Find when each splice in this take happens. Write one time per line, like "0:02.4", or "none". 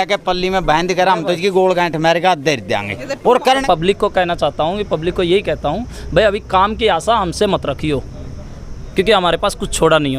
0:03.4